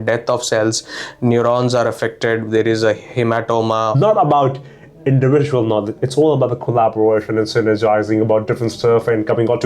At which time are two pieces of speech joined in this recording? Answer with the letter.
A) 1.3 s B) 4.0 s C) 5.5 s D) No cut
B